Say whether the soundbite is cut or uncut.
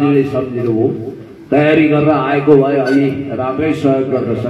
uncut